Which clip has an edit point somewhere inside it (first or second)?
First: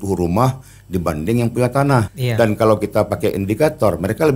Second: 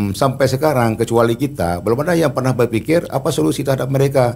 first